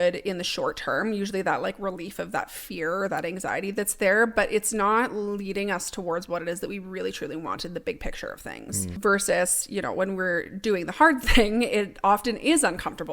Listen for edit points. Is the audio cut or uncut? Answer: cut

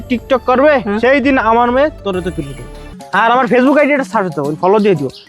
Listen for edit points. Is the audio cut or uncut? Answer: cut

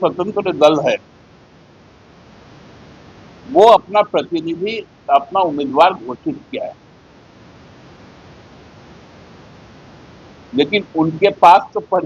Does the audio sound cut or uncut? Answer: uncut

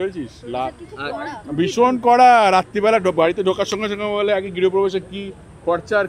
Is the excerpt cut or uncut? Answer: uncut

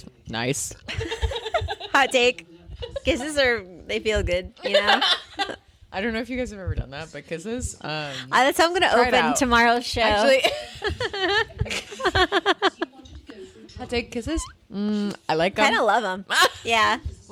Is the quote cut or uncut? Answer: uncut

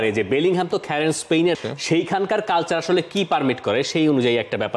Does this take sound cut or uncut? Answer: cut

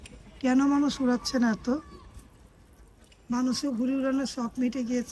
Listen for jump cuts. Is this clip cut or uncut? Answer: uncut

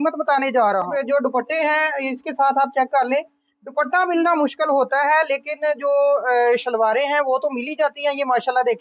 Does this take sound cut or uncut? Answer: cut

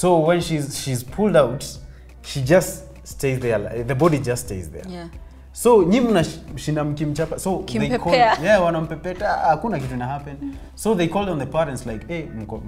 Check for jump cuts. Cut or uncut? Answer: uncut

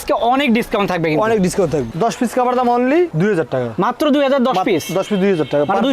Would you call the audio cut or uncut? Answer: cut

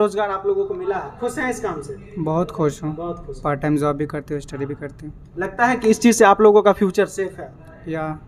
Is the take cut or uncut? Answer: uncut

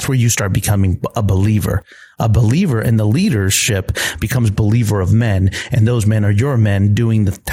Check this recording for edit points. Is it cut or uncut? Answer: uncut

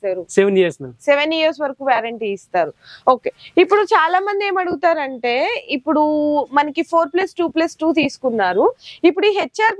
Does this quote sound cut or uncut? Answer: uncut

